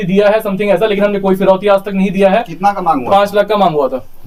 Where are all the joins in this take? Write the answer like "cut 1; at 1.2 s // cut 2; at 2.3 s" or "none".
none